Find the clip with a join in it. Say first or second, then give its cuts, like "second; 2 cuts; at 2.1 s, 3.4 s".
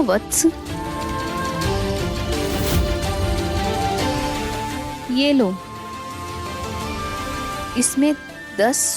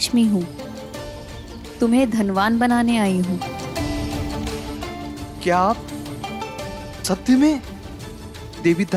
first; 3 cuts; at 1.2 s, 3.6 s, 7.6 s